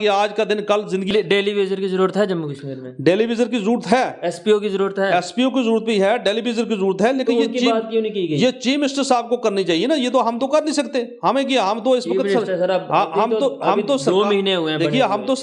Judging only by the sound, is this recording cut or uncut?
cut